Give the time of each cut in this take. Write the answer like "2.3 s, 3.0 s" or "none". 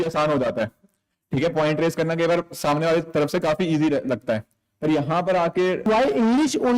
5.9 s